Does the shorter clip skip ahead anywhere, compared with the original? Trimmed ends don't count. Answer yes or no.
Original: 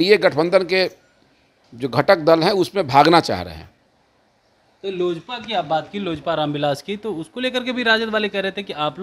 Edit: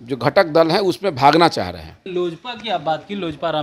yes